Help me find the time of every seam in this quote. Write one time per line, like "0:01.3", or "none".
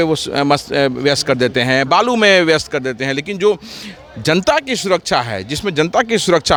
none